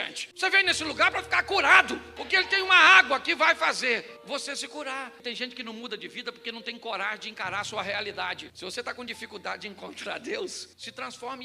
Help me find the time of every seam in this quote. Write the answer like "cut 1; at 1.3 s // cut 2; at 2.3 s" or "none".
cut 1; at 5.2 s // cut 2; at 8.4 s